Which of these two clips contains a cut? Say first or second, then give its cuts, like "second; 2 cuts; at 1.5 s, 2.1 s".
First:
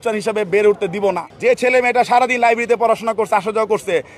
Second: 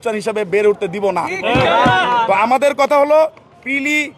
first; 1 cut; at 1.3 s